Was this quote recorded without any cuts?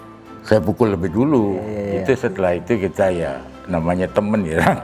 no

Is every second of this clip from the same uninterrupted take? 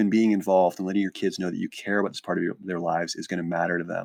yes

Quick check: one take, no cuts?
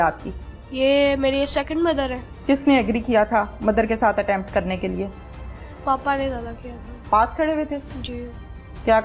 no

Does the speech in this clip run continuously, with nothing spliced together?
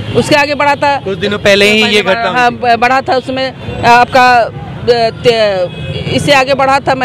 yes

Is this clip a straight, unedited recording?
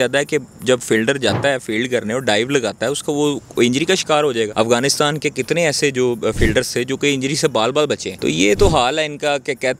no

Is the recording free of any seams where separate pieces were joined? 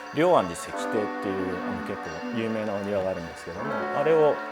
yes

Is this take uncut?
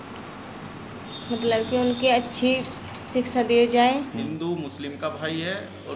no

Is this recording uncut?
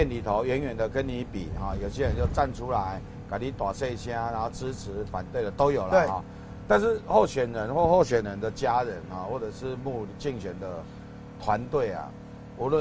yes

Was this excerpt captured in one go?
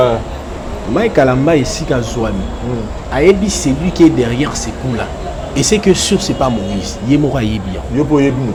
yes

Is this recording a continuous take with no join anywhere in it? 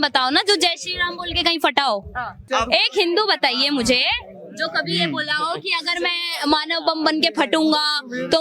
no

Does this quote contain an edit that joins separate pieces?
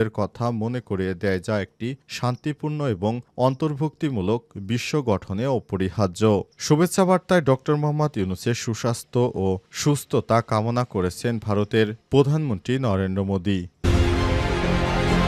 yes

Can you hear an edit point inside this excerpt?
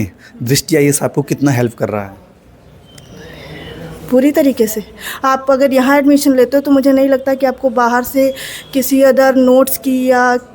no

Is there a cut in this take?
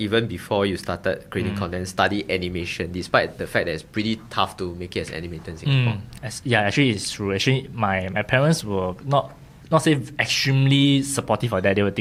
no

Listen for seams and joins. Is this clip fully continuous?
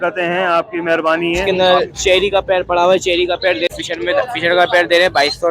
no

